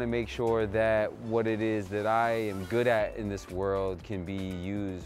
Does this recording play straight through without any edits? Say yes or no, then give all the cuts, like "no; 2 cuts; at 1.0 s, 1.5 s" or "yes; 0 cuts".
yes; 0 cuts